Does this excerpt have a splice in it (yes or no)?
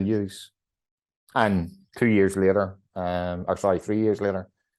no